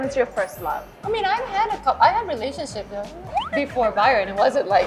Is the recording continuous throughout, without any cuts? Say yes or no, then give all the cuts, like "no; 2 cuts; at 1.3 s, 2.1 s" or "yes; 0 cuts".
no; 2 cuts; at 0.9 s, 3.2 s